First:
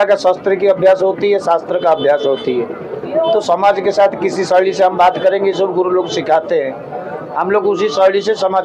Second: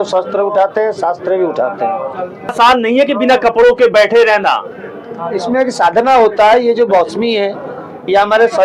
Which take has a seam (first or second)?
second